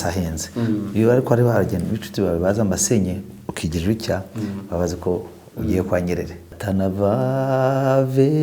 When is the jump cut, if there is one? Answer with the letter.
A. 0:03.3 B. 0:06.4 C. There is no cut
B